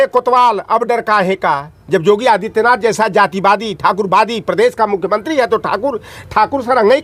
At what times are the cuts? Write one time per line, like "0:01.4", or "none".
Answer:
none